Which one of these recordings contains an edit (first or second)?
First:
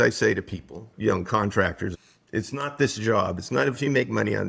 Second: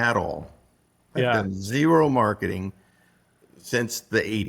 first